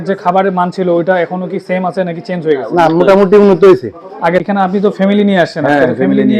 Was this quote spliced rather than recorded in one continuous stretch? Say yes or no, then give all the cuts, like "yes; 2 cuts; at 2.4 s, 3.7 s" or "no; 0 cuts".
yes; 1 cut; at 4.5 s